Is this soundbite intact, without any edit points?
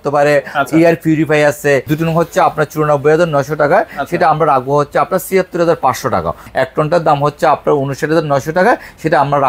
no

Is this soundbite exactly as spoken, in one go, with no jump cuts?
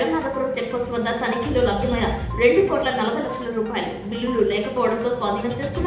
yes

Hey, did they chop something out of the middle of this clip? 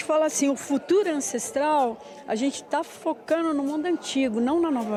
no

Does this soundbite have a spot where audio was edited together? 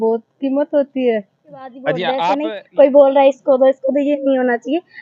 yes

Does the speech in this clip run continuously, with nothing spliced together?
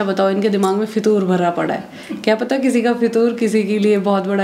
yes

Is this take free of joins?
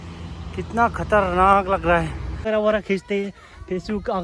no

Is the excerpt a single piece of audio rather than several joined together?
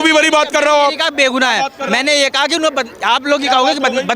yes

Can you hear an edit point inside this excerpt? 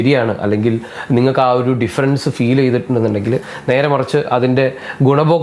yes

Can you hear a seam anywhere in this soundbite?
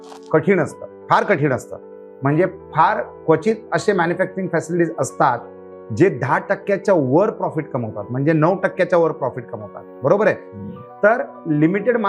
no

